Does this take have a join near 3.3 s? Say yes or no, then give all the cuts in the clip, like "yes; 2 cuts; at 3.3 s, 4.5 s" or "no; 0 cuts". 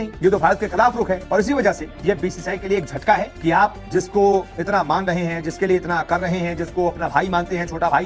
no; 0 cuts